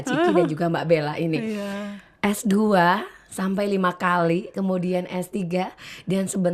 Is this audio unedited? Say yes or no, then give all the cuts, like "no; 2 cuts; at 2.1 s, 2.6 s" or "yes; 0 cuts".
yes; 0 cuts